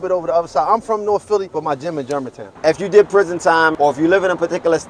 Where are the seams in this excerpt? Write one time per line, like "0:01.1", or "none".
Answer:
0:01.5
0:02.5
0:03.7